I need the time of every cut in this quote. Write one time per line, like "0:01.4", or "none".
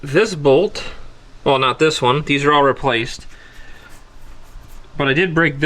none